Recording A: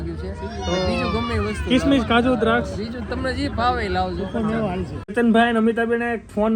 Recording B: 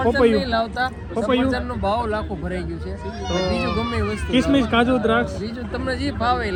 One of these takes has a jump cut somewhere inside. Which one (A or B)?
A